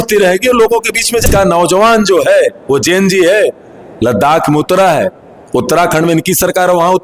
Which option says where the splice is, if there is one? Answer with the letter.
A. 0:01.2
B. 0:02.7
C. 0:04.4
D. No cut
A